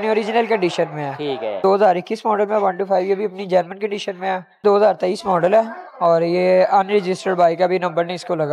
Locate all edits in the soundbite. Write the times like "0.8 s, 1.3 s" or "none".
1.6 s, 4.6 s